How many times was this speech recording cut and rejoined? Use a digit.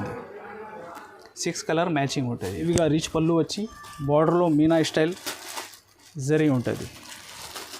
1